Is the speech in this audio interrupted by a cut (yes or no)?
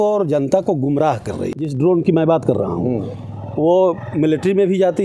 yes